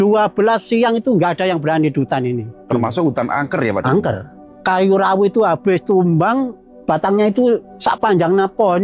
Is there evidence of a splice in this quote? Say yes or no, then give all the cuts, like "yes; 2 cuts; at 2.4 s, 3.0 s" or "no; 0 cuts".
yes; 3 cuts; at 4.4 s, 6.7 s, 7.7 s